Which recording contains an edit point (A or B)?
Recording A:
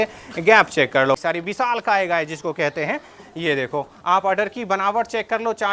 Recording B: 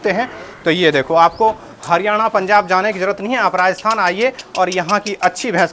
A